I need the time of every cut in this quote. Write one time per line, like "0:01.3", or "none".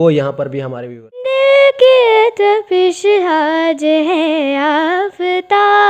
0:01.3